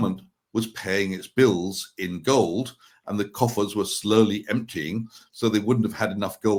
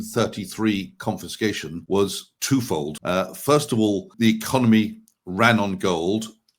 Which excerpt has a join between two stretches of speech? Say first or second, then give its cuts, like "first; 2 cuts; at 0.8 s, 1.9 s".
second; 3 cuts; at 1.7 s, 3.0 s, 4.1 s